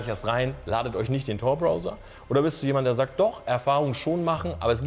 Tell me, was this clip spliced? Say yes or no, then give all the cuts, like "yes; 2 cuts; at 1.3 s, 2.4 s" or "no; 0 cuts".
no; 0 cuts